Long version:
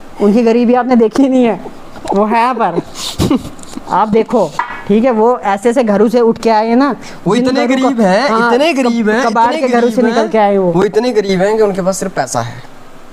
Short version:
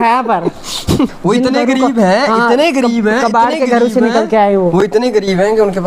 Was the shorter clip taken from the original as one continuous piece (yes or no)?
no